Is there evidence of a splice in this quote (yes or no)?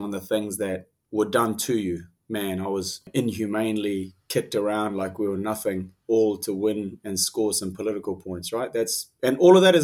yes